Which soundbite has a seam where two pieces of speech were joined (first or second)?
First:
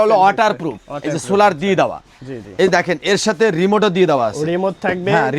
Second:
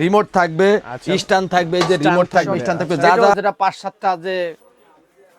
second